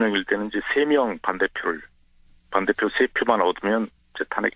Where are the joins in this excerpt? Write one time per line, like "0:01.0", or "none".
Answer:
none